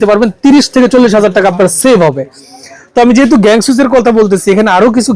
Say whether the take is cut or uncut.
uncut